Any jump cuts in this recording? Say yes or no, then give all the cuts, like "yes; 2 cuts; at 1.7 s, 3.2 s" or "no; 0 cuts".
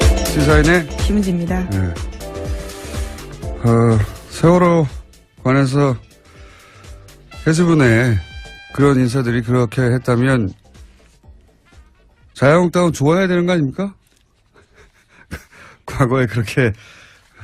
yes; 1 cut; at 13.2 s